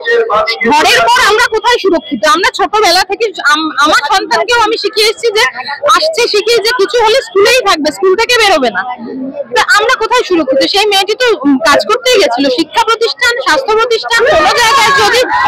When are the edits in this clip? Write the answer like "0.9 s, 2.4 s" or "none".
none